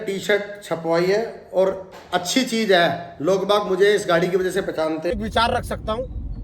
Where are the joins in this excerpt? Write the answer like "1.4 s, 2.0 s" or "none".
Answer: 5.1 s